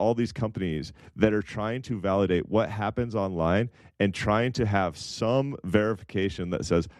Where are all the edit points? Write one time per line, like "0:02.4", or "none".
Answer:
none